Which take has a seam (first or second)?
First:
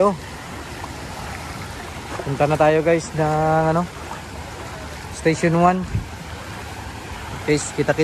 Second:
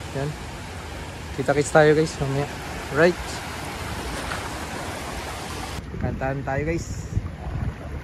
second